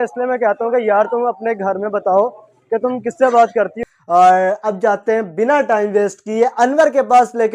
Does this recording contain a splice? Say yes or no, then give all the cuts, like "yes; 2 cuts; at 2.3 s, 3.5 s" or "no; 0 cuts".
yes; 1 cut; at 3.7 s